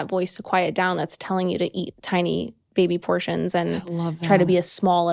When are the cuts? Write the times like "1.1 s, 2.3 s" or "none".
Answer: none